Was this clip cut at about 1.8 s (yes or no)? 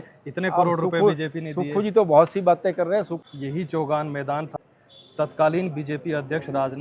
no